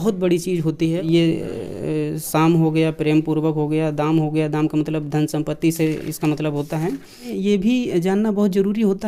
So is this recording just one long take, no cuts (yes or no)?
no